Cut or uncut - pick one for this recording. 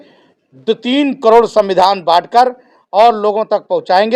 uncut